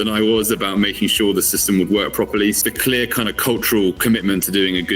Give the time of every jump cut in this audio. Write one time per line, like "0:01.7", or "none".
0:02.6